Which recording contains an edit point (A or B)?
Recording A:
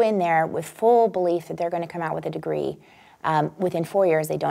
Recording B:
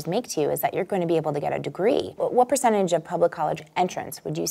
B